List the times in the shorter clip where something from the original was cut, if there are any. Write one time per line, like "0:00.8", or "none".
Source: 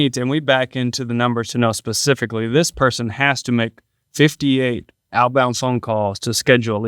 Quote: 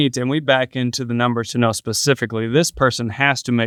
none